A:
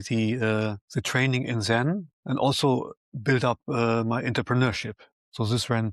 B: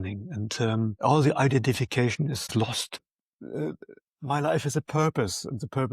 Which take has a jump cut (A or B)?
B